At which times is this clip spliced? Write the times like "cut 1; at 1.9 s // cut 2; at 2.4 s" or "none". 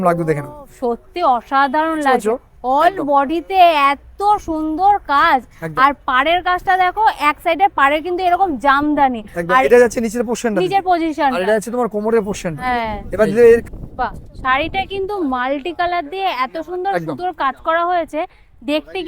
cut 1; at 13.7 s